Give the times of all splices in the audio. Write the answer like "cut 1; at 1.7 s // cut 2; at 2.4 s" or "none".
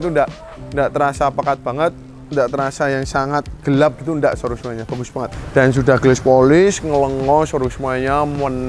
cut 1; at 5.4 s